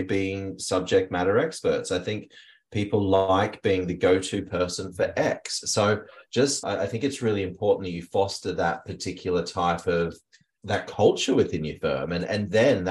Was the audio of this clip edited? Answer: no; 0 cuts

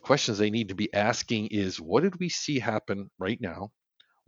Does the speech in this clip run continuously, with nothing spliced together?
yes; 0 cuts

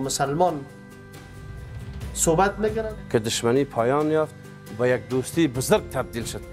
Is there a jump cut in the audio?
yes; 1 cut; at 2.9 s

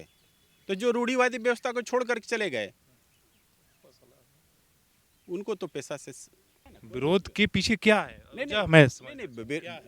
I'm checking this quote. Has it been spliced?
yes; 1 cut; at 6.7 s

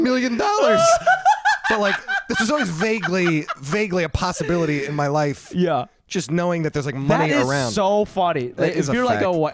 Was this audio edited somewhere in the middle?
no; 0 cuts

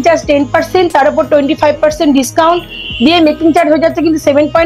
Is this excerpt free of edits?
yes; 0 cuts

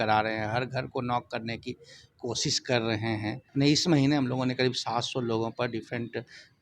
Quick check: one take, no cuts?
no; 1 cut; at 3.4 s

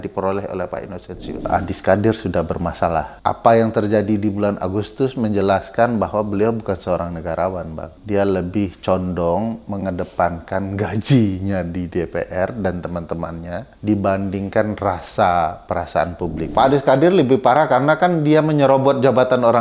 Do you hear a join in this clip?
yes; 5 cuts; at 1.5 s, 3.1 s, 7.9 s, 13.7 s, 16.4 s

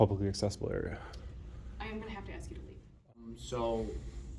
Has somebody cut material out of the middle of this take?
yes; 1 cut; at 3.3 s

